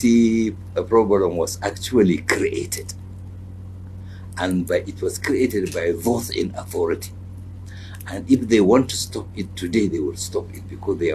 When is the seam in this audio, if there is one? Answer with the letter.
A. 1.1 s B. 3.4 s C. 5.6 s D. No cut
D